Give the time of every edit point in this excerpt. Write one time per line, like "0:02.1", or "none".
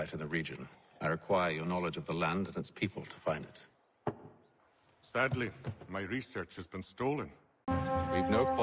0:07.7